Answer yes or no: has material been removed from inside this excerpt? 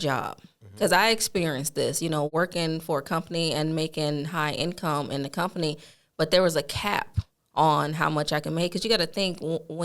yes